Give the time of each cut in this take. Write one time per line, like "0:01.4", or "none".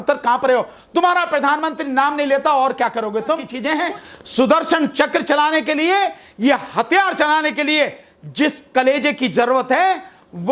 0:03.5